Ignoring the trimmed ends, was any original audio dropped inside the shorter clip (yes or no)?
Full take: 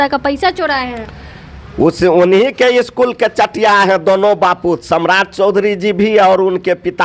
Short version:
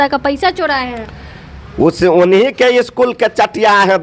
no